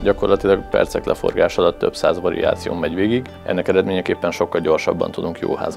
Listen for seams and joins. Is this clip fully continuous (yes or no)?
no